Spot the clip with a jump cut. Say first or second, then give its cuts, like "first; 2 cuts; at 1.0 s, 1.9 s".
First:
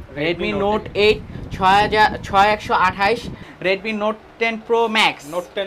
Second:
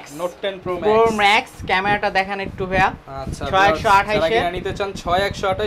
first; 1 cut; at 3.4 s